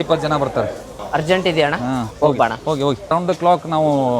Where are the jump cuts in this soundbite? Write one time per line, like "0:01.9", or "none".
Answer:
0:00.9
0:02.1
0:03.1